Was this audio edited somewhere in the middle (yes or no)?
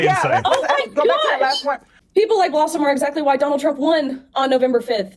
yes